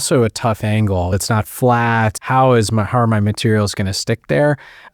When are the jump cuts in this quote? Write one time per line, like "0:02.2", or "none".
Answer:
0:01.2